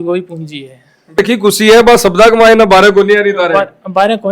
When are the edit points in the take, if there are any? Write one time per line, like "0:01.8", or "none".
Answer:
0:01.2

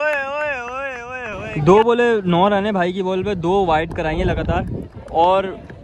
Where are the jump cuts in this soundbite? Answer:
0:01.5

